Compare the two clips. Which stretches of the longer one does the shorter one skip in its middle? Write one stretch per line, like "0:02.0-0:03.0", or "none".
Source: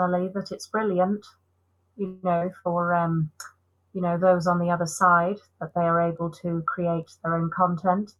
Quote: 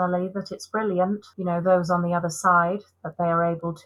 0:01.3-0:03.9